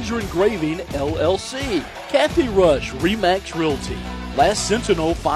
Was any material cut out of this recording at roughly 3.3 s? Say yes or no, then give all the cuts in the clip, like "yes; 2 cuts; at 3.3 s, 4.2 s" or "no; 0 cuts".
no; 1 cut; at 2.0 s